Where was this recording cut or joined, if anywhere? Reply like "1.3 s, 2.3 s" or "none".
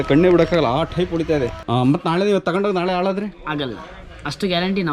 1.6 s